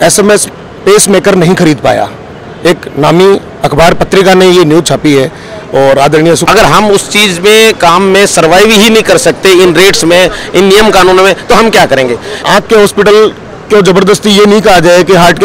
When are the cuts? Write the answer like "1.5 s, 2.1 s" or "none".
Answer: 6.4 s, 12.4 s